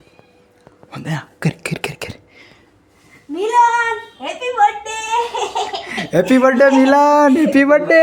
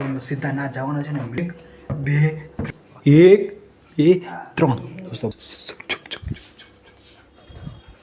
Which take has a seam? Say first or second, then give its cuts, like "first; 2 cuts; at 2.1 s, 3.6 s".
second; 3 cuts; at 1.4 s, 2.6 s, 5.3 s